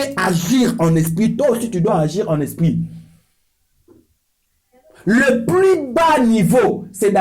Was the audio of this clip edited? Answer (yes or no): no